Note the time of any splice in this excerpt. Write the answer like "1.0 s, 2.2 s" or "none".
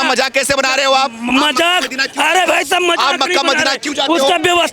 none